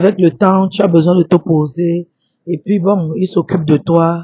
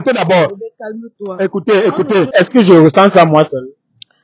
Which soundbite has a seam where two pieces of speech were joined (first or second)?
second